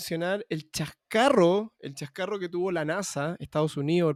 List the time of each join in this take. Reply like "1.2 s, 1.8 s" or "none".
none